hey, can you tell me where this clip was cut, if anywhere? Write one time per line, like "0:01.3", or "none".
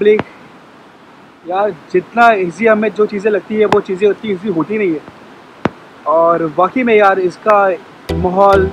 none